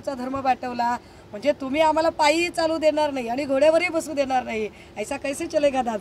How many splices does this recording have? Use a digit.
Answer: 0